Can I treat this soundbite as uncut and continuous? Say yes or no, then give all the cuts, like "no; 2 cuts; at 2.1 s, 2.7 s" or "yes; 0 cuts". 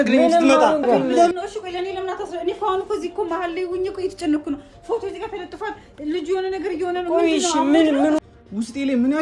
no; 2 cuts; at 1.3 s, 8.2 s